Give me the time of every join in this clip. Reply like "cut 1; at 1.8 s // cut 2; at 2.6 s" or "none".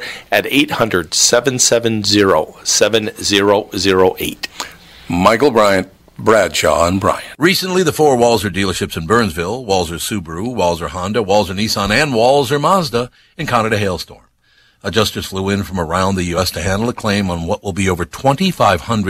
cut 1; at 7.3 s

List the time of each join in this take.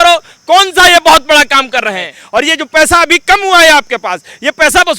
cut 1; at 2.1 s

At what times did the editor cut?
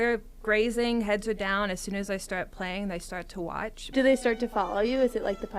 cut 1; at 3.8 s

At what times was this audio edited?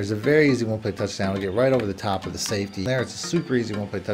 cut 1; at 2.8 s

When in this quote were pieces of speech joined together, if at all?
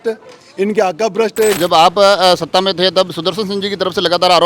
cut 1; at 1.6 s

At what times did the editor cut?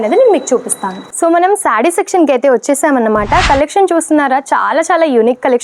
none

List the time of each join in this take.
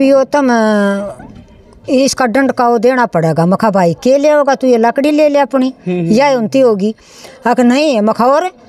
none

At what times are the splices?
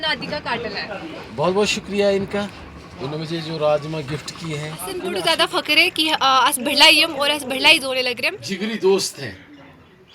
cut 1; at 5.1 s // cut 2; at 8.3 s

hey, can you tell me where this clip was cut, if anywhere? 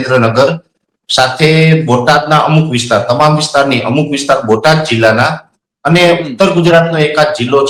none

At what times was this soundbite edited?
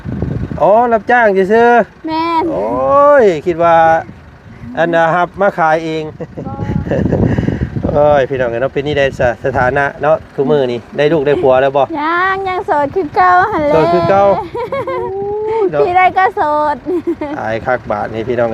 cut 1; at 6.4 s

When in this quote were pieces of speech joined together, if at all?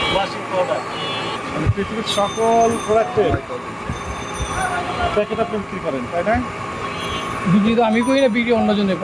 cut 1; at 1.3 s

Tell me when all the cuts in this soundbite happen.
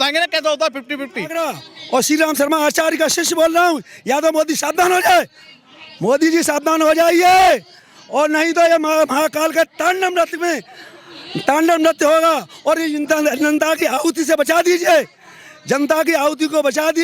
cut 1; at 1.3 s

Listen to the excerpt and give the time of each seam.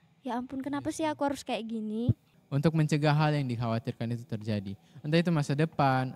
cut 1; at 2.3 s

